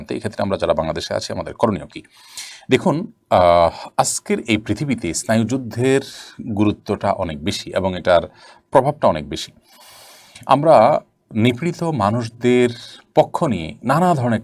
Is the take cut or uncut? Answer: uncut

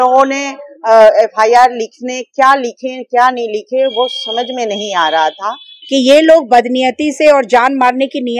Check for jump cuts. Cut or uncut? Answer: cut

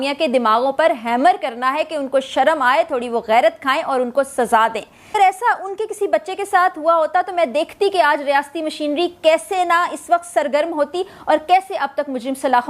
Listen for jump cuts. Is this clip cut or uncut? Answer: cut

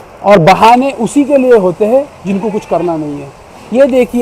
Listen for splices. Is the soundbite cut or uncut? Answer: uncut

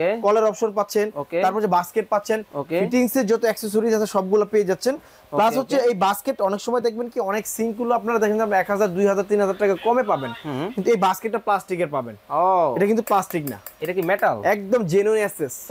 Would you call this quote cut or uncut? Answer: uncut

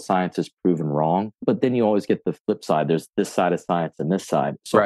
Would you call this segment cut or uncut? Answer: cut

